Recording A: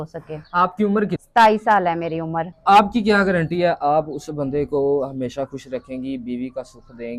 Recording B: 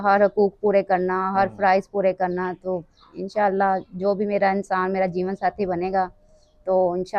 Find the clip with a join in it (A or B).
A